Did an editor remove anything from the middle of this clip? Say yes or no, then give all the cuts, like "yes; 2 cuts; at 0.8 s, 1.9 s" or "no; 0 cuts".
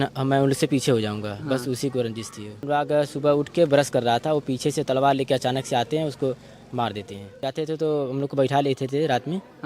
yes; 2 cuts; at 2.6 s, 7.4 s